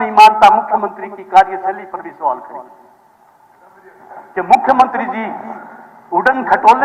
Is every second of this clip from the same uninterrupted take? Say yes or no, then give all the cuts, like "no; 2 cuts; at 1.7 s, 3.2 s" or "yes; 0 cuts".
yes; 0 cuts